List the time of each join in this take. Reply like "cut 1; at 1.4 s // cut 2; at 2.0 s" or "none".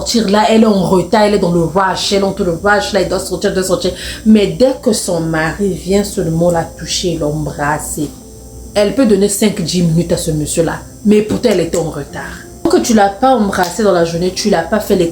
cut 1; at 12.6 s